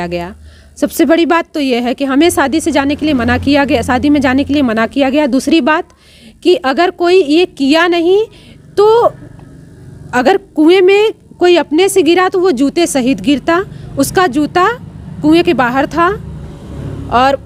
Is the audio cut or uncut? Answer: uncut